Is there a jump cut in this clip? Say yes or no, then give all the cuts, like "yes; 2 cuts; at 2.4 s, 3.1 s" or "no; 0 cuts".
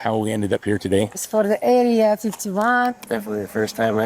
yes; 2 cuts; at 1.2 s, 2.9 s